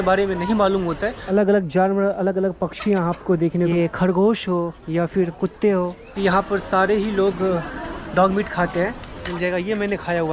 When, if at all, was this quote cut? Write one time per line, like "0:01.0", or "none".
0:01.2
0:03.7
0:06.0
0:09.2